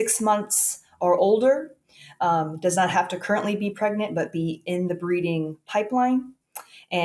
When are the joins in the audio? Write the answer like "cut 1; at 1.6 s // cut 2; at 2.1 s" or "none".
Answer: none